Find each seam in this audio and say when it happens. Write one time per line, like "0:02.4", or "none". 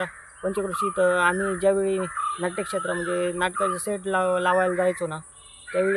none

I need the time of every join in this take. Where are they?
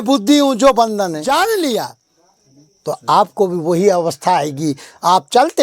0:01.3

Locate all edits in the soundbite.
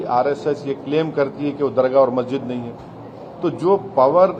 none

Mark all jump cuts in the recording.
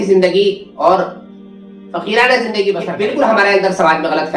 0:02.9

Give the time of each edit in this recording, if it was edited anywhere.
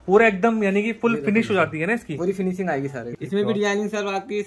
0:03.0

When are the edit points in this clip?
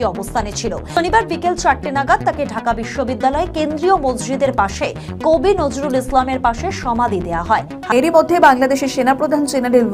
0:01.0
0:07.9

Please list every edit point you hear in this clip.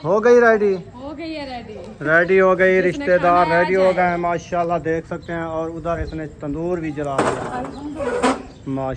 none

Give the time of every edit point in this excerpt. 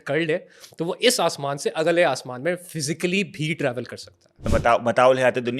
0:04.5

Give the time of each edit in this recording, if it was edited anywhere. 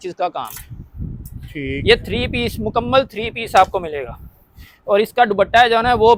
none

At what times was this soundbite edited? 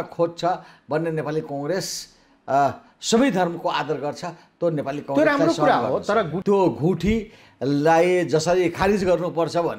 0:06.4

